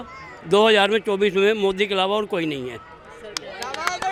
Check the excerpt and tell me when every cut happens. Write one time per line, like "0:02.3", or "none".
none